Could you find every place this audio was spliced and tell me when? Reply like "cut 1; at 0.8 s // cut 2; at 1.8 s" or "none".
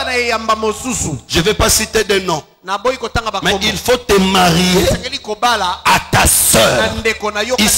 none

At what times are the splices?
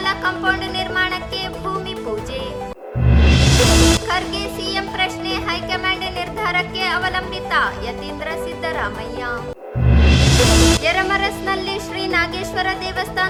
none

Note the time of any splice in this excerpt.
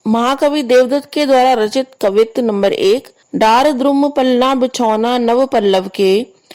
cut 1; at 3.2 s

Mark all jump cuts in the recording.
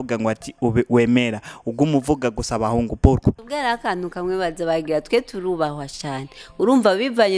cut 1; at 3.4 s

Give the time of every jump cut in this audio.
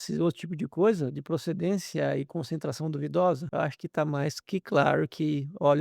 cut 1; at 3.4 s

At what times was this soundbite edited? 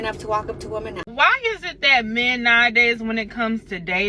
cut 1; at 1.1 s

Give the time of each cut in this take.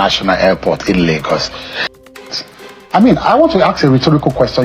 cut 1; at 2.0 s

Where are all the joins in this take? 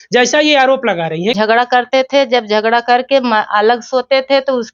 cut 1; at 1.3 s

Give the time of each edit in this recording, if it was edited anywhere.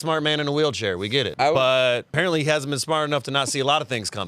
cut 1; at 1.3 s // cut 2; at 2.1 s

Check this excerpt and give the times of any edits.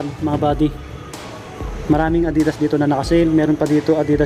none

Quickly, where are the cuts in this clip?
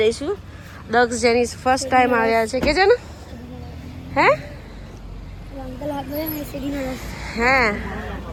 none

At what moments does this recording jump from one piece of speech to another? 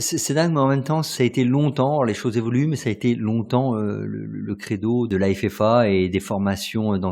cut 1; at 1.1 s // cut 2; at 5.1 s

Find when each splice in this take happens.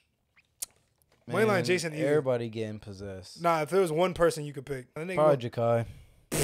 cut 1; at 5.0 s

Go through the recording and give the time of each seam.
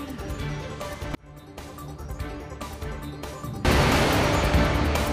cut 1; at 2.9 s

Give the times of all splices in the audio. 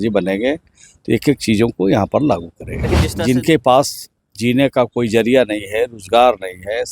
cut 1; at 3.0 s

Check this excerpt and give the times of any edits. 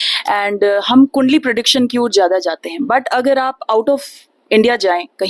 none

